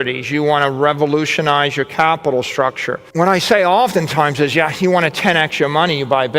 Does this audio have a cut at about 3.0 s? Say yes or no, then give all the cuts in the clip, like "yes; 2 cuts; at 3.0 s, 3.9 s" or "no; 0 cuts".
yes; 1 cut; at 3.0 s